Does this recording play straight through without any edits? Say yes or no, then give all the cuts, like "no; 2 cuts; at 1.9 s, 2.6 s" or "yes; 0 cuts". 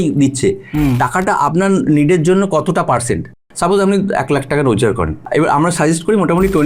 no; 2 cuts; at 3.4 s, 5.2 s